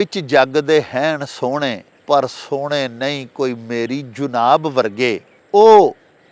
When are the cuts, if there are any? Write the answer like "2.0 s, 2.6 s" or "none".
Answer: 1.9 s, 5.3 s